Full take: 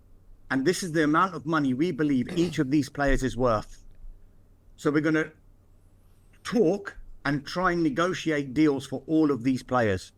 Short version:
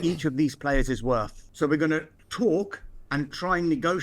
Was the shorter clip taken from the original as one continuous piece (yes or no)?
no